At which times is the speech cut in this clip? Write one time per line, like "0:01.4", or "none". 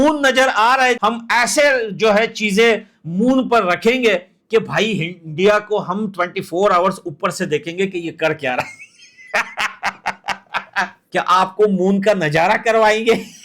0:01.0
0:11.1